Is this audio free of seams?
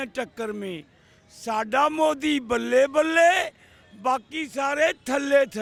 yes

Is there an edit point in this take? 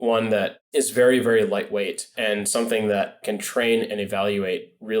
yes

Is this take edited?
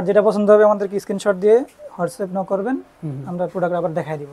no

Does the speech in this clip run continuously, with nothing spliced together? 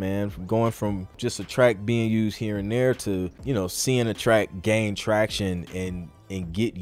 no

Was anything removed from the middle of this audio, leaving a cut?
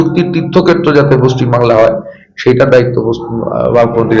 no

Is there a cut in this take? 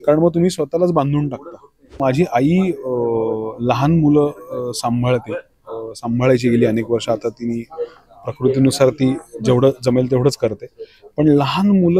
yes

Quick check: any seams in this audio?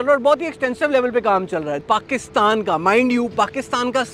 yes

